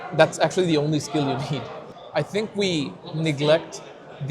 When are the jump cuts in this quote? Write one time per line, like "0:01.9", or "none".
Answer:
0:01.7